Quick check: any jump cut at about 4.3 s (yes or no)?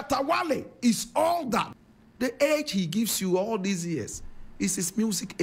no